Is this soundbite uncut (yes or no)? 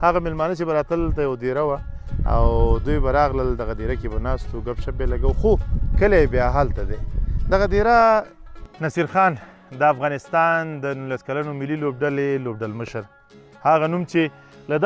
no